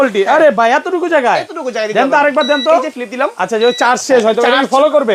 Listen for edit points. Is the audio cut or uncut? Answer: uncut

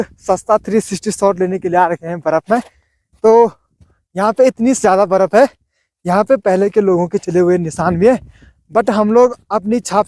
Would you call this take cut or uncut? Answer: uncut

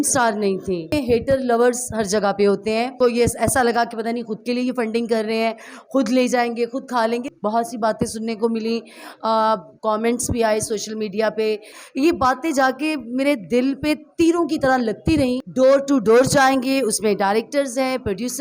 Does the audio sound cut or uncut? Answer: cut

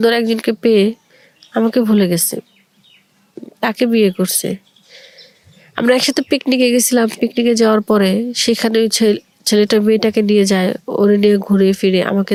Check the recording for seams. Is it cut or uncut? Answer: uncut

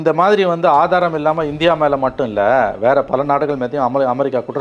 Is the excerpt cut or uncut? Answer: uncut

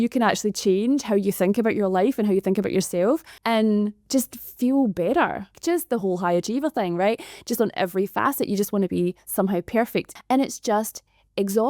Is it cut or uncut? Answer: cut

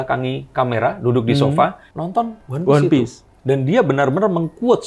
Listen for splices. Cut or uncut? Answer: cut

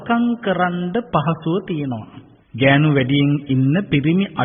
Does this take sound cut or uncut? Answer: uncut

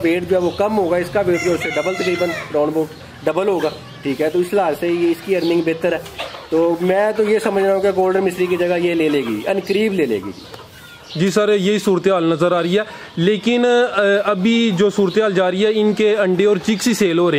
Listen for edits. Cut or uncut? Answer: uncut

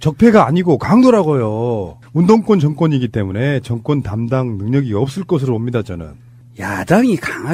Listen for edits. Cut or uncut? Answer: uncut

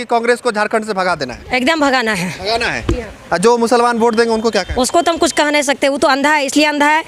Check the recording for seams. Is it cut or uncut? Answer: uncut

